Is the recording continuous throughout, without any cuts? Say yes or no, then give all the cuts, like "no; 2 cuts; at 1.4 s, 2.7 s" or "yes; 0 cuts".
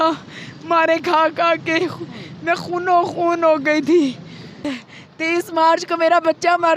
no; 1 cut; at 4.7 s